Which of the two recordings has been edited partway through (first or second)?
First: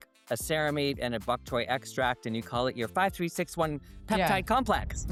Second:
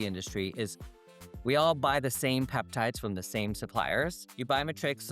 second